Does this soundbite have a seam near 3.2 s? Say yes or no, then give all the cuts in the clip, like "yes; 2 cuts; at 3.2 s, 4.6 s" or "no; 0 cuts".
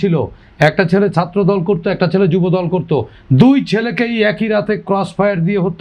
no; 0 cuts